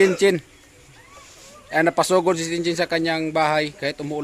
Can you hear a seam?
no; 0 cuts

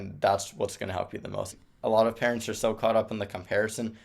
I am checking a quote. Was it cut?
yes; 1 cut; at 1.5 s

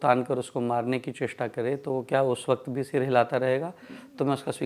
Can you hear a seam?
no; 0 cuts

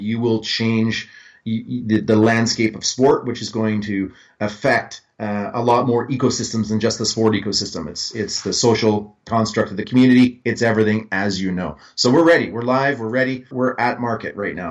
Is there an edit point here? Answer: yes; 1 cut; at 13.5 s

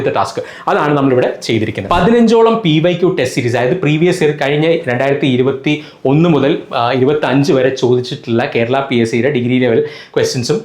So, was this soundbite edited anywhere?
yes; 1 cut; at 1.8 s

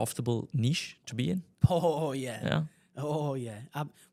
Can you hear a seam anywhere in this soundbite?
no; 0 cuts

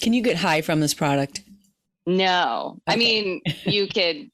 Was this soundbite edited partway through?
no; 0 cuts

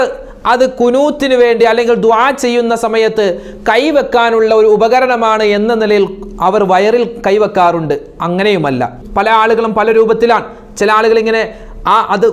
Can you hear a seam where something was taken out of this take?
yes; 1 cut; at 9.0 s

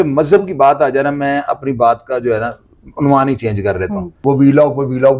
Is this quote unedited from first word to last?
no; 1 cut; at 4.1 s

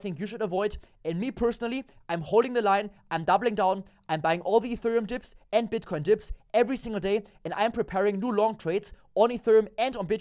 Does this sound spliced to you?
no; 0 cuts

